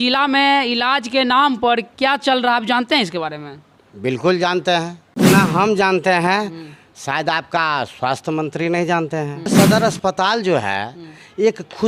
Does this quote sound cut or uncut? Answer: cut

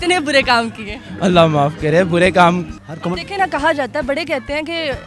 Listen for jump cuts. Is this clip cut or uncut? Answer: cut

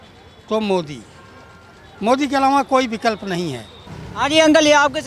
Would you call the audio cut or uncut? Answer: uncut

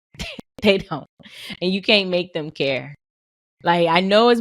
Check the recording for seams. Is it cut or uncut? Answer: uncut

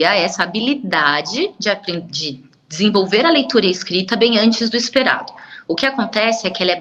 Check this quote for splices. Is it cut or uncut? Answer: uncut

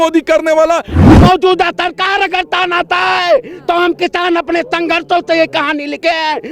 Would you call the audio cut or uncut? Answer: cut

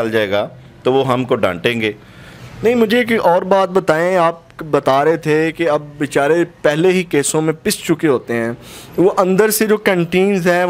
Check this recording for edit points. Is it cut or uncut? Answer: uncut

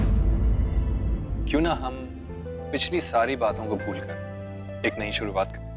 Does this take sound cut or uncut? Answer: cut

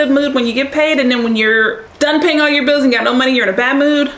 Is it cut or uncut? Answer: cut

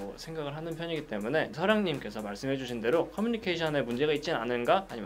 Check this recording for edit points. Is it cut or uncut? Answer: uncut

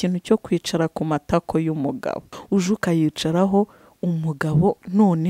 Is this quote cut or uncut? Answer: cut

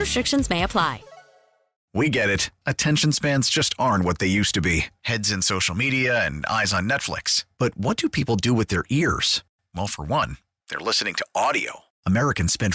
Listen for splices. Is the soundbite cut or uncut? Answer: cut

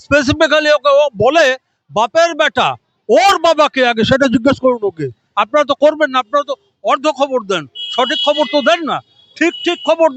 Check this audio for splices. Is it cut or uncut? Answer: uncut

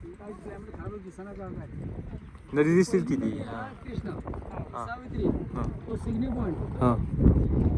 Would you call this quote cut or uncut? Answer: uncut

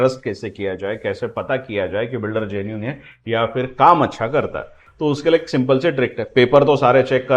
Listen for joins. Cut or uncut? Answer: uncut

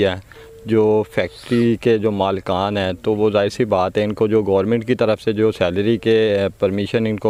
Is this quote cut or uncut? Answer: uncut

